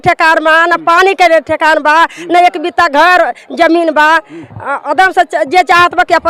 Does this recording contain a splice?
no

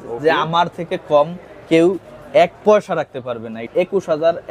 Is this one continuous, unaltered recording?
no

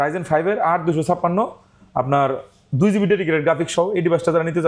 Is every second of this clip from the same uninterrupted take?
yes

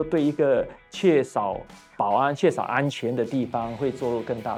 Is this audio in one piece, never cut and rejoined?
yes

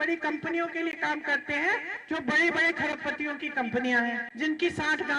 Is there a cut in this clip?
yes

